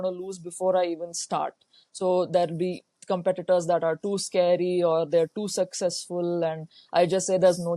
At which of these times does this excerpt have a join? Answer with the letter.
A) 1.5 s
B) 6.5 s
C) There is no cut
C